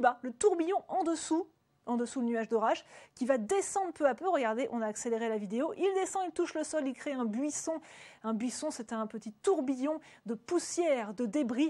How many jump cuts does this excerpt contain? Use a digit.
1